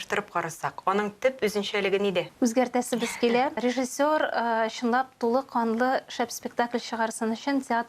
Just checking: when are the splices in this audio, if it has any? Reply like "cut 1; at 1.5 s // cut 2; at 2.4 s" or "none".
cut 1; at 2.3 s // cut 2; at 3.6 s

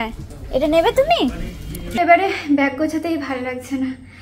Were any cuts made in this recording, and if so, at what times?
cut 1; at 1.9 s

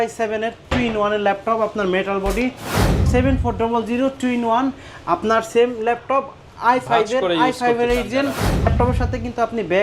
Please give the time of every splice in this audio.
cut 1; at 3.0 s // cut 2; at 8.7 s

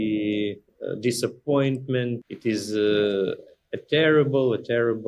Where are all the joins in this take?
cut 1; at 2.3 s

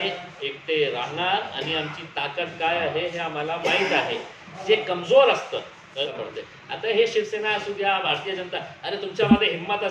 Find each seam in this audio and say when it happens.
cut 1; at 6.2 s

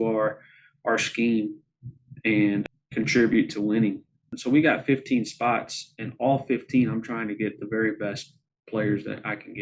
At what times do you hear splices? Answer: cut 1; at 2.7 s // cut 2; at 4.3 s

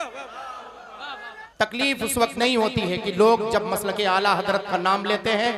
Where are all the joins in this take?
cut 1; at 1.4 s

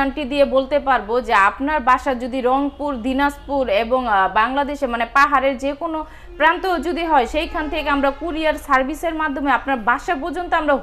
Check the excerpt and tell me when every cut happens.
none

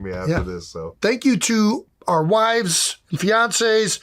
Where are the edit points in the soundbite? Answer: cut 1; at 0.9 s

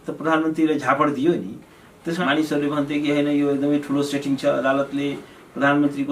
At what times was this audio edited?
cut 1; at 2.1 s

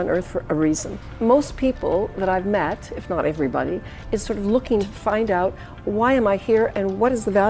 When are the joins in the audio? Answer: cut 1; at 1.0 s // cut 2; at 4.9 s

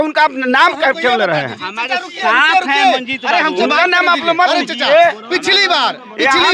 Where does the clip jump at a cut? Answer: none

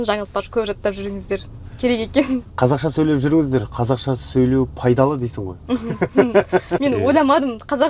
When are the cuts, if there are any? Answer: cut 1; at 6.7 s

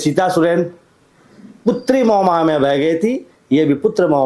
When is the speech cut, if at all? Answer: none

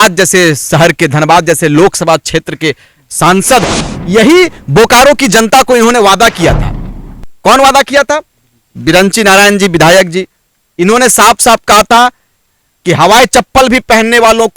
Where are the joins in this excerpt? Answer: cut 1; at 3.9 s

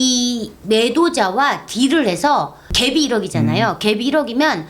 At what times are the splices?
cut 1; at 2.7 s

